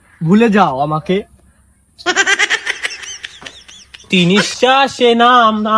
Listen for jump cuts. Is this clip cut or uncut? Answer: cut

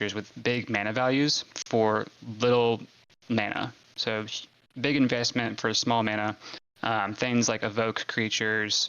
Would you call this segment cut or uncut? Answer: cut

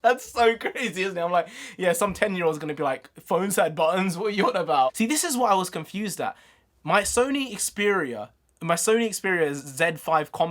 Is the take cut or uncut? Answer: cut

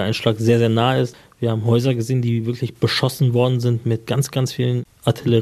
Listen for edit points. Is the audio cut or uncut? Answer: cut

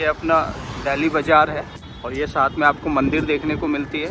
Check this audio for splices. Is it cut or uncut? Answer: uncut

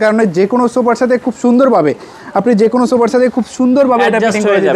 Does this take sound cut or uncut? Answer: uncut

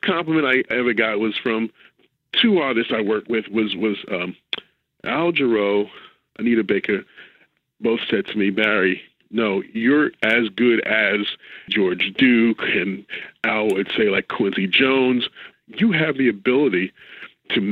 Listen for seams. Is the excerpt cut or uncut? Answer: cut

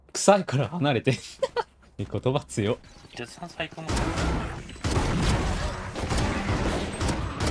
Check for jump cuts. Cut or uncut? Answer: cut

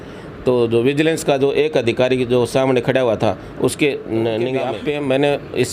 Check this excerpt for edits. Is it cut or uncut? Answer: cut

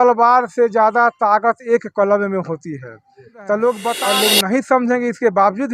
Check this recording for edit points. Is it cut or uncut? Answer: cut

